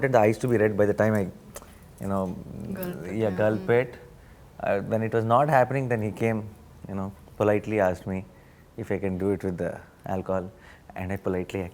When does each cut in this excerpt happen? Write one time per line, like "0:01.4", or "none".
none